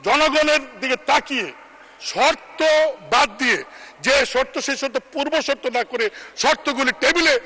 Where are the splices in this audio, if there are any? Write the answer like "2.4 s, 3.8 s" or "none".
none